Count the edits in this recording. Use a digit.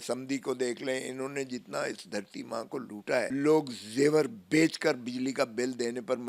1